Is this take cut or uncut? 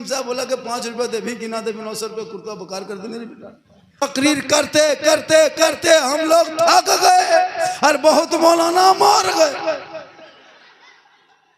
cut